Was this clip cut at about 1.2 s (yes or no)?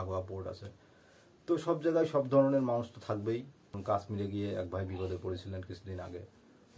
no